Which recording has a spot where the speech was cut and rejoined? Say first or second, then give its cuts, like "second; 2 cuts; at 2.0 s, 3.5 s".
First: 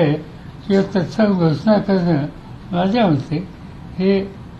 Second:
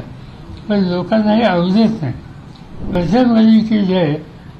second; 1 cut; at 3.0 s